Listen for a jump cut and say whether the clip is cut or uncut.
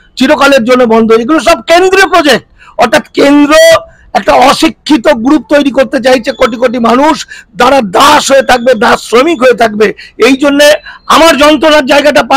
uncut